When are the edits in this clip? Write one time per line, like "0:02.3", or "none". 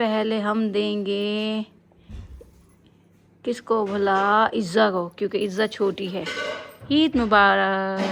none